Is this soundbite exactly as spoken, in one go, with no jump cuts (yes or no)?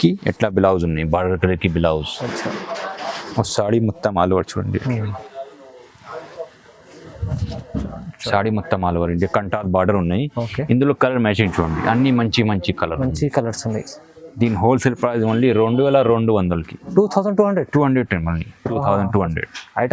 yes